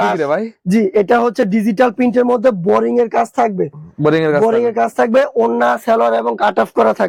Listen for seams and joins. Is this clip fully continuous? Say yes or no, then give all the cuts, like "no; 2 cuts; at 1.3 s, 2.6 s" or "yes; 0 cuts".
yes; 0 cuts